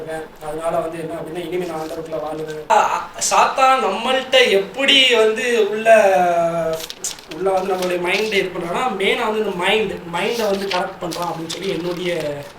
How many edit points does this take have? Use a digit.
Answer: 1